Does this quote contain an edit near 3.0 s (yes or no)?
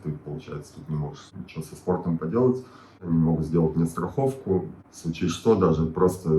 yes